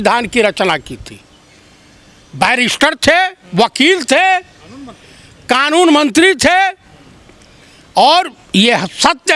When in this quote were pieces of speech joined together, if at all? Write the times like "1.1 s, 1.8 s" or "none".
none